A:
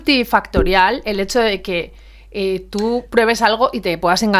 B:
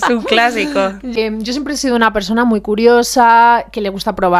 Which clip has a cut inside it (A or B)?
B